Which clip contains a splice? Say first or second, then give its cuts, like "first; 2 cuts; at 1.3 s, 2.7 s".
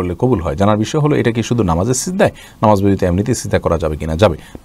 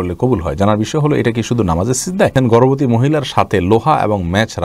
second; 1 cut; at 2.3 s